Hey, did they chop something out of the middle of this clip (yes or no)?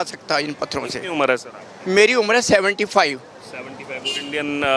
no